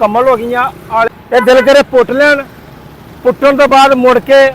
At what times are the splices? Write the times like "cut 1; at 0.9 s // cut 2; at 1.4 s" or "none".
cut 1; at 1.1 s